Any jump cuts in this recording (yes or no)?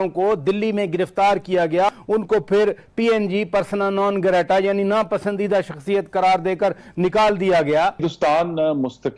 yes